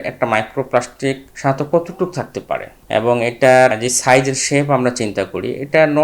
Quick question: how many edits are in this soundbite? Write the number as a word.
three